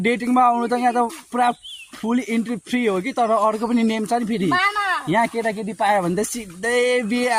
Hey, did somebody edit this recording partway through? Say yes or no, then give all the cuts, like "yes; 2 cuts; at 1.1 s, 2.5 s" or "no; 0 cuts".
no; 0 cuts